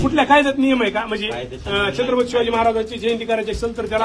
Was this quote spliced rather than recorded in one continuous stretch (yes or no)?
no